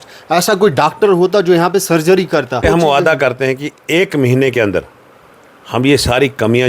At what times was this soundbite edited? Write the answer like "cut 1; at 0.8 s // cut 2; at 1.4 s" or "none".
cut 1; at 2.6 s